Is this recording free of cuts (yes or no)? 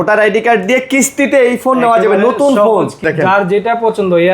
no